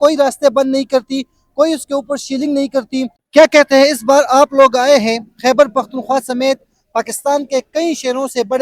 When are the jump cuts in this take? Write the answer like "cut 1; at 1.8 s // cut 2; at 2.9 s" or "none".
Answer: cut 1; at 3.2 s